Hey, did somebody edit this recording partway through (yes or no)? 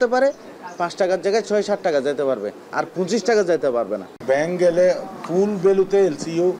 yes